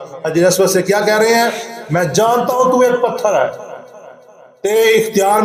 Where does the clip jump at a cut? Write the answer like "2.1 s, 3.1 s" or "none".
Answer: none